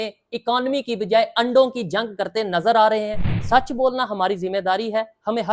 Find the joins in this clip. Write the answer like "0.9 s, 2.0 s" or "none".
3.3 s